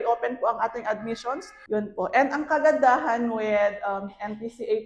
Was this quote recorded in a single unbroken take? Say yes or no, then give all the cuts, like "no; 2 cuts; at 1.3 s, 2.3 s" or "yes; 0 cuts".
no; 1 cut; at 1.5 s